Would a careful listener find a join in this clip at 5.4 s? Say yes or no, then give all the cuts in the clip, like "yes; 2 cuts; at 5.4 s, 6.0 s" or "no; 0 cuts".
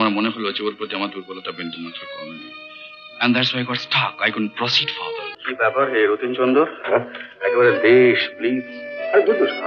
yes; 1 cut; at 5.4 s